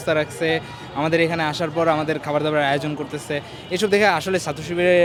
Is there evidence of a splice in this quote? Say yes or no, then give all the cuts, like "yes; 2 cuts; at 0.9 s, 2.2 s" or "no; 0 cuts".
no; 0 cuts